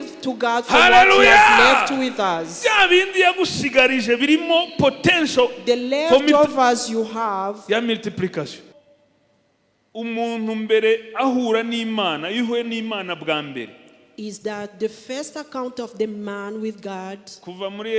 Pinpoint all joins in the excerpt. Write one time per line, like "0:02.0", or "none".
0:08.6